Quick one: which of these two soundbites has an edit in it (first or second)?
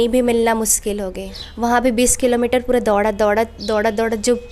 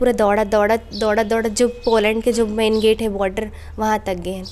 first